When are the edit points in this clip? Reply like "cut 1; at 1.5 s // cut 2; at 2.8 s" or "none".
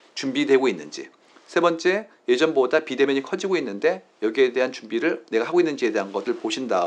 none